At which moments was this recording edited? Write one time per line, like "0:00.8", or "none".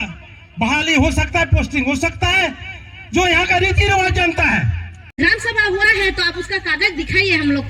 0:05.2